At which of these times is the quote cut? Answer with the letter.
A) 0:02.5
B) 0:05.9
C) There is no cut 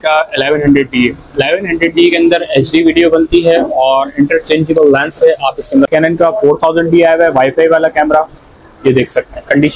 B